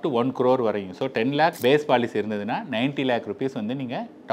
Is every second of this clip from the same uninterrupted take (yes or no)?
yes